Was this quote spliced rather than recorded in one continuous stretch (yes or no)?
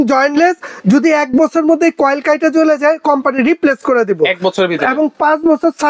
no